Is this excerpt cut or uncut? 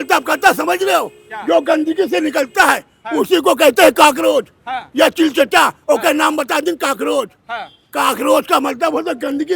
uncut